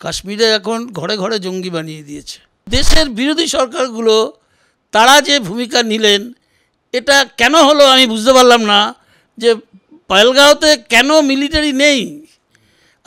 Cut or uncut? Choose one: cut